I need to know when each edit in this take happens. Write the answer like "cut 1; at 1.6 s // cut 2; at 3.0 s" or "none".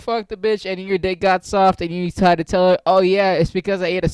none